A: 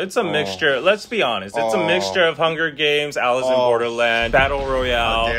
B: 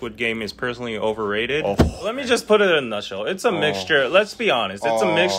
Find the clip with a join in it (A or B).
B